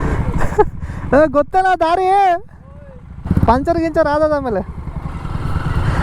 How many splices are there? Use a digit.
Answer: 1